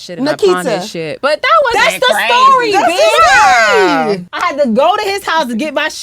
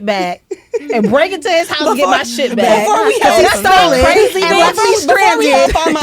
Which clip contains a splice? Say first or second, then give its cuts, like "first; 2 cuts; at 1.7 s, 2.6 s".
first; 1 cut; at 4.3 s